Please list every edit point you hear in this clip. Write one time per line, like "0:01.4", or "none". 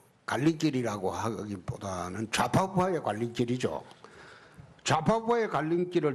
0:04.7